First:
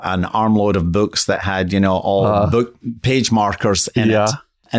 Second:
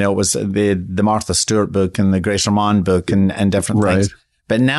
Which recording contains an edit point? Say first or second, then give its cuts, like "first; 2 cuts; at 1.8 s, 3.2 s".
first; 1 cut; at 2.8 s